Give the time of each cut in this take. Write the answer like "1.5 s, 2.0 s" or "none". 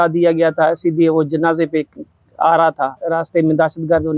3.0 s

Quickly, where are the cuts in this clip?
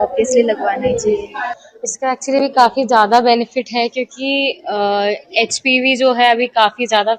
1.5 s

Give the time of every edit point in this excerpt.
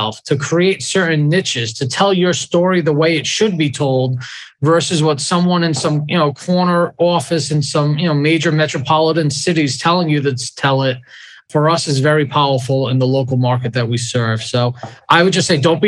none

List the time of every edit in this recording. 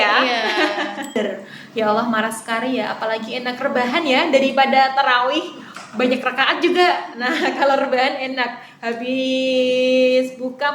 1.2 s

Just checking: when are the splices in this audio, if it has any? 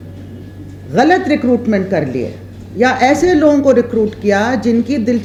none

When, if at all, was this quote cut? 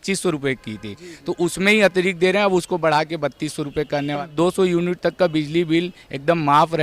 4.2 s

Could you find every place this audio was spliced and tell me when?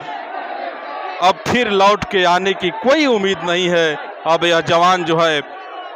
none

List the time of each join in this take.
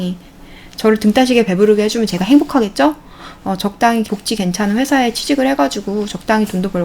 4.1 s

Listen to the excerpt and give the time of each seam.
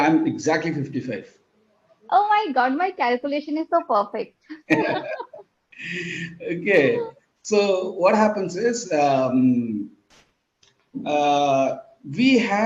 none

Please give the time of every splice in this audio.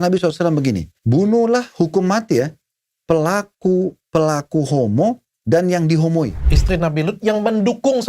0.9 s, 6.5 s

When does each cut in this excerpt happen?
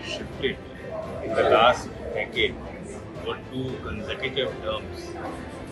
none

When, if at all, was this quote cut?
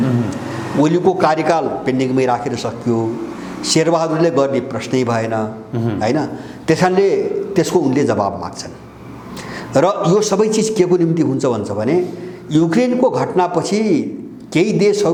none

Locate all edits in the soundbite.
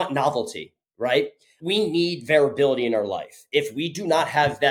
none

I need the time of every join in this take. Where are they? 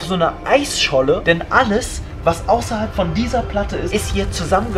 3.9 s

